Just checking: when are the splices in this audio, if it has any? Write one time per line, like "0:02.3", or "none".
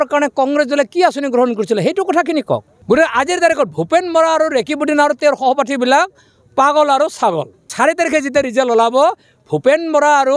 0:02.7
0:07.7